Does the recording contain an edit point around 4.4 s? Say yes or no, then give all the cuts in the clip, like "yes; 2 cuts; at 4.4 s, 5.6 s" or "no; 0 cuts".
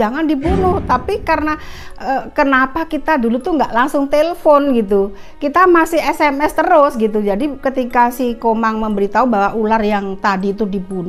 no; 0 cuts